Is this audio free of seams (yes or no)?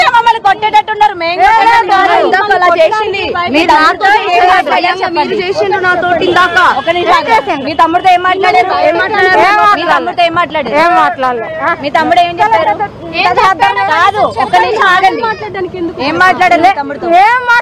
no